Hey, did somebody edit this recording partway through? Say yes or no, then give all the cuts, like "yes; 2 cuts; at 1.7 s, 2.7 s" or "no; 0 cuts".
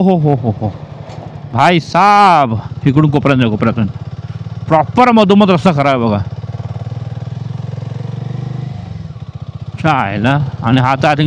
no; 0 cuts